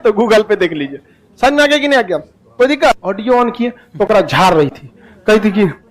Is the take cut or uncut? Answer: cut